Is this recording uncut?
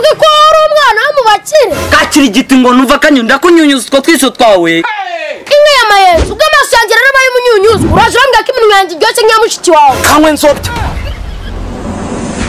no; 1 cut; at 10.0 s

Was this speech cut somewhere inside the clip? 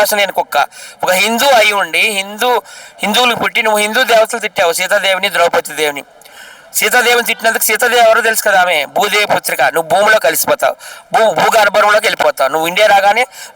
no; 0 cuts

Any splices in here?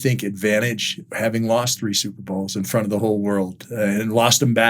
yes; 1 cut; at 1.0 s

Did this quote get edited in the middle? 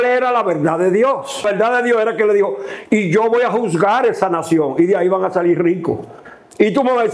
yes; 1 cut; at 1.4 s

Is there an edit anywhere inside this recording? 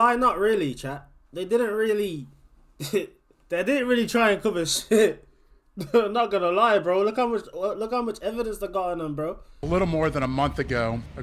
yes; 1 cut; at 9.5 s

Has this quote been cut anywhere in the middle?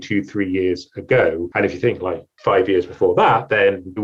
yes; 1 cut; at 1.9 s

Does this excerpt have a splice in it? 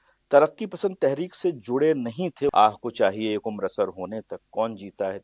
yes; 1 cut; at 2.5 s

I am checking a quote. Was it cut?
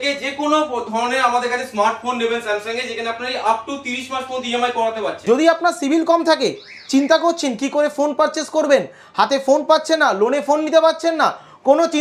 yes; 1 cut; at 5.1 s

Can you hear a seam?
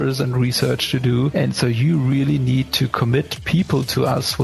yes; 1 cut; at 1.3 s

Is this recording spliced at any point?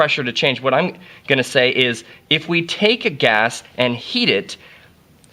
yes; 1 cut; at 2.2 s

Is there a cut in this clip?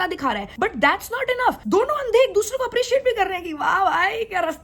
no; 0 cuts

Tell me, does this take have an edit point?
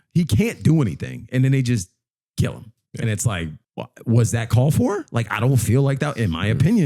yes; 1 cut; at 3.6 s

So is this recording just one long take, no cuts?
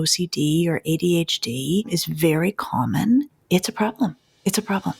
no; 2 cuts; at 2.0 s, 3.4 s

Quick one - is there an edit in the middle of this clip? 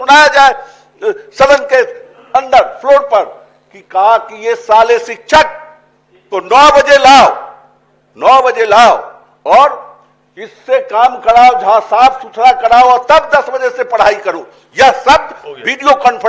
no; 0 cuts

